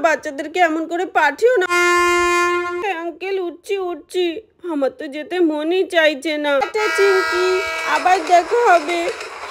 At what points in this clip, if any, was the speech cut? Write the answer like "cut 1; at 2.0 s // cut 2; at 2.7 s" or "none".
cut 1; at 1.7 s // cut 2; at 2.8 s // cut 3; at 6.7 s

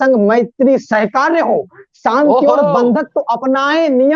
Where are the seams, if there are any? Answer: none

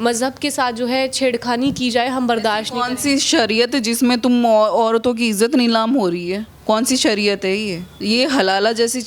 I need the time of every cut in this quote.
cut 1; at 6.5 s // cut 2; at 7.9 s

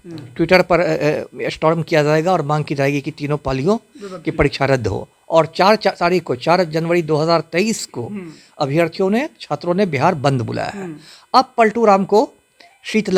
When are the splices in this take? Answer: none

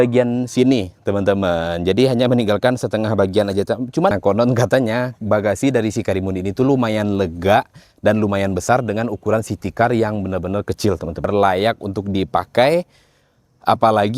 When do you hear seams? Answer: cut 1; at 4.1 s // cut 2; at 11.3 s

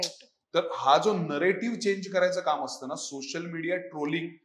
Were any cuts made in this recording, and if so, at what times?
none

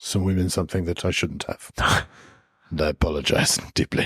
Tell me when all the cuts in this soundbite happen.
none

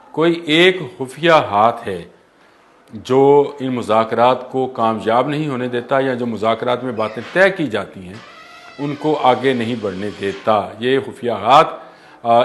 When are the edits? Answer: none

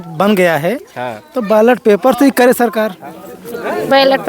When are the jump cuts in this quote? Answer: cut 1; at 3.0 s

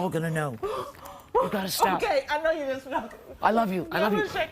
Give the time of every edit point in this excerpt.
cut 1; at 1.4 s

